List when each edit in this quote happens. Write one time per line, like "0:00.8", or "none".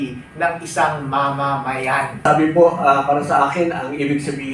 0:02.3